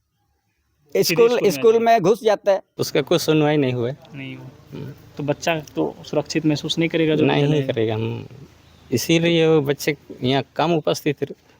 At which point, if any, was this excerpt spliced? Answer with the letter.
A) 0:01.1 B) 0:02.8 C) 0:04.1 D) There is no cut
B